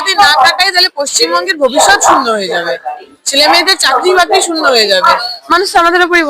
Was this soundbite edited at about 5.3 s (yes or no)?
yes